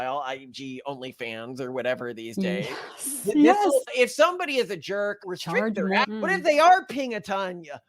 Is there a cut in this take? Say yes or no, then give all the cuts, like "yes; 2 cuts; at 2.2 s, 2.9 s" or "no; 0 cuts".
yes; 3 cuts; at 3.9 s, 5.2 s, 6.1 s